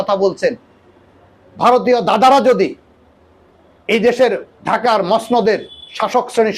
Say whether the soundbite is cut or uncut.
uncut